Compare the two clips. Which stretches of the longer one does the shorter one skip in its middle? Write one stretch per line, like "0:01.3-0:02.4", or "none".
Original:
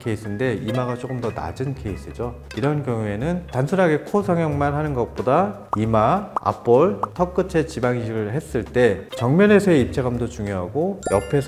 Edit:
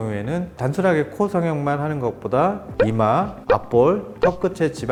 none